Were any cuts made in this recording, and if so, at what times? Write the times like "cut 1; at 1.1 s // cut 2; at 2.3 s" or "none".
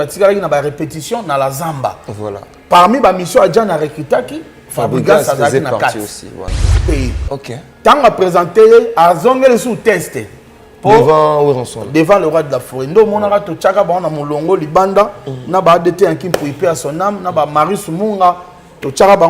cut 1; at 6.8 s